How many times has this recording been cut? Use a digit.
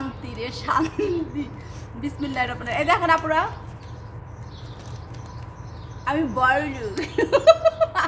0